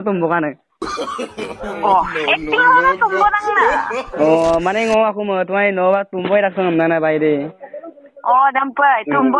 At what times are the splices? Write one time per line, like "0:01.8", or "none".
none